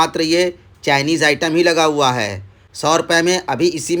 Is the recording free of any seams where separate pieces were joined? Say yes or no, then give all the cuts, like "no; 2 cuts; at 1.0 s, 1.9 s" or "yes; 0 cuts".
yes; 0 cuts